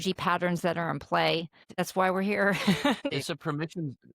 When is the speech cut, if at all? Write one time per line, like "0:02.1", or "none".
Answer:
0:01.7
0:03.1